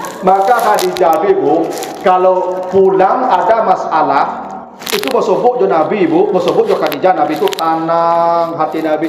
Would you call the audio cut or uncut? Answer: uncut